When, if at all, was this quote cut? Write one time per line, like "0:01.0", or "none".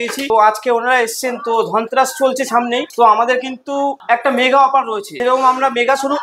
none

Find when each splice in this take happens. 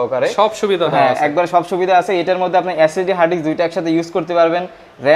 none

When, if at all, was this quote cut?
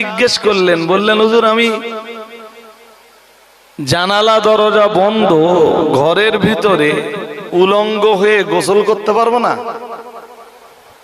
none

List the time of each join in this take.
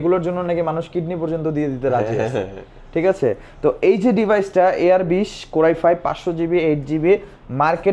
none

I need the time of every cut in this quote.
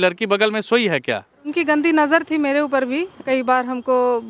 0:01.5
0:03.2

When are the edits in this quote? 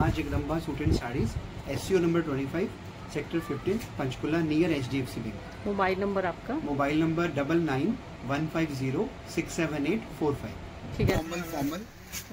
0:11.2

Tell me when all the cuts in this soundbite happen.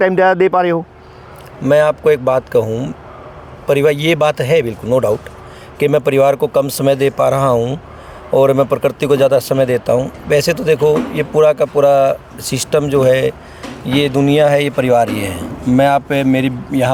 none

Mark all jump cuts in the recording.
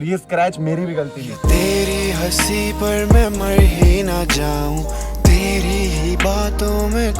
0:01.4

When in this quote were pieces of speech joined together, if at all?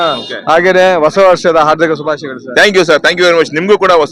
none

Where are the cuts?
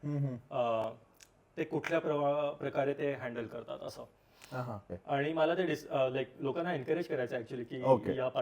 0:04.9

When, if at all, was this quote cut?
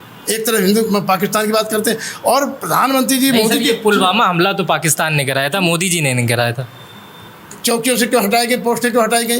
none

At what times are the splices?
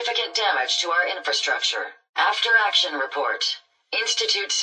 0:02.0

